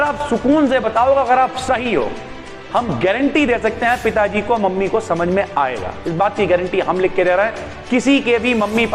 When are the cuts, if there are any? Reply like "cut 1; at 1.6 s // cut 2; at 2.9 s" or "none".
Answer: none